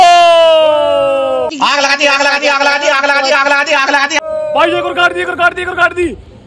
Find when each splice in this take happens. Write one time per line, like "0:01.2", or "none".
none